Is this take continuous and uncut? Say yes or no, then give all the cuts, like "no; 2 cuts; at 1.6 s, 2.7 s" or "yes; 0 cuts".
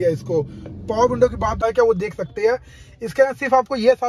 no; 1 cut; at 1.6 s